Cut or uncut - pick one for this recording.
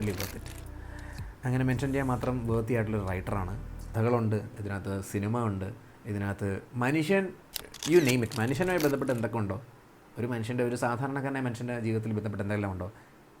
cut